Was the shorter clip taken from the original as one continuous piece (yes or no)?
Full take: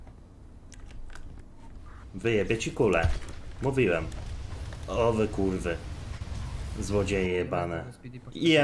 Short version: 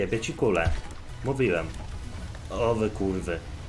yes